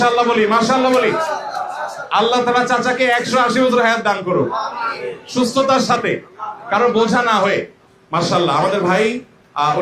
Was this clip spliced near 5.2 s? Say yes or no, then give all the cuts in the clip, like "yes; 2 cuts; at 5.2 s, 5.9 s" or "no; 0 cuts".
no; 1 cut; at 7.8 s